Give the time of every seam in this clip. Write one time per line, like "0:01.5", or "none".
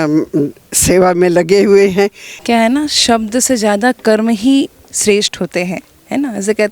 0:02.3